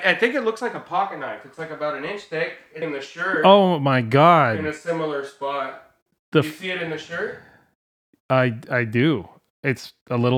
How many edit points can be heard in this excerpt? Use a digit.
1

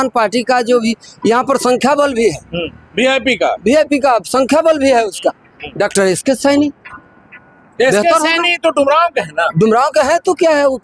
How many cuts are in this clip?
0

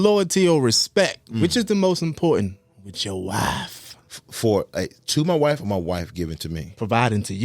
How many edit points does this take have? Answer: 1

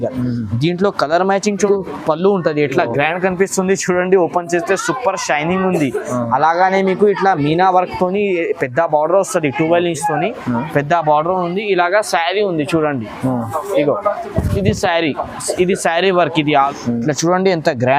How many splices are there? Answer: 2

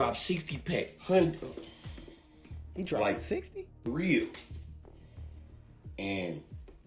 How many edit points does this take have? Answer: 0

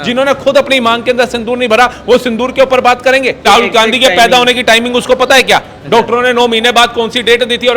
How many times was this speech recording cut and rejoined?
1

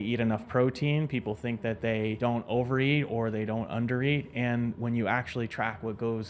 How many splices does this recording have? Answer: 1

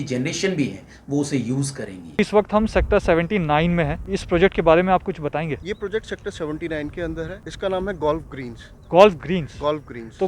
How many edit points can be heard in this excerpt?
4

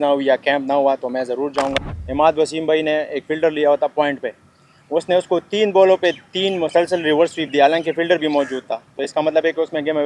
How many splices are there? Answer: 1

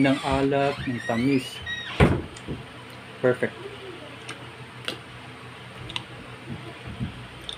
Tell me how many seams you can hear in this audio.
0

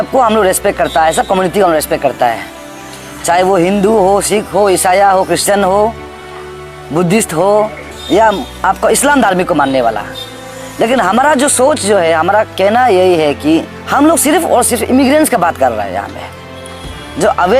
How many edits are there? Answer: 2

